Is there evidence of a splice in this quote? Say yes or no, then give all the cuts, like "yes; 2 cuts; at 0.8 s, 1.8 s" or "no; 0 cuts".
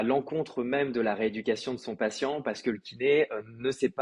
no; 0 cuts